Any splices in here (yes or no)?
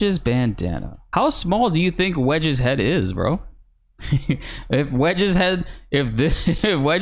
no